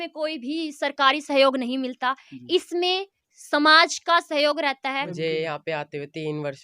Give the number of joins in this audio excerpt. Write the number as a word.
one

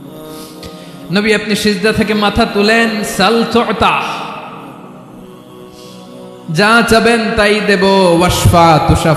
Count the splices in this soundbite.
three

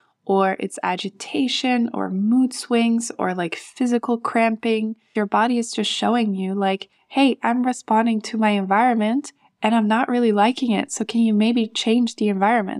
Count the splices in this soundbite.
one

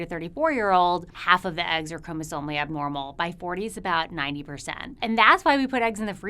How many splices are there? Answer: two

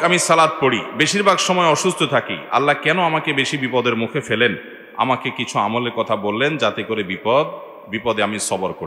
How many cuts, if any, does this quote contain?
zero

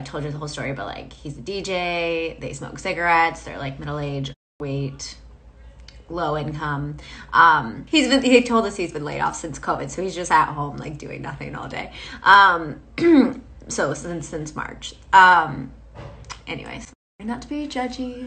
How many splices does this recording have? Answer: one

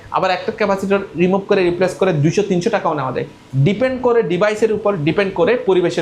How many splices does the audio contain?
zero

